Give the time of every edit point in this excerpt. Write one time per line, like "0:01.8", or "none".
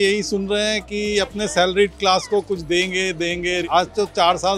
0:03.6